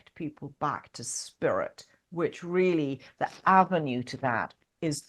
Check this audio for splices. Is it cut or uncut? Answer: uncut